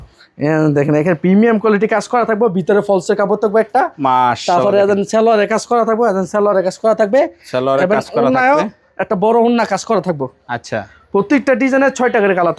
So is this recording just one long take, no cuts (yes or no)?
yes